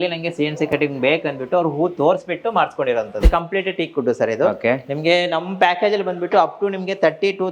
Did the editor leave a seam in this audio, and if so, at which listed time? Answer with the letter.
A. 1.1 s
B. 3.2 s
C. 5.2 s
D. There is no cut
B